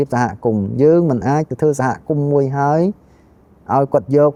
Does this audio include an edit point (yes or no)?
no